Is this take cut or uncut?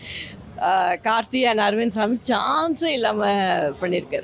uncut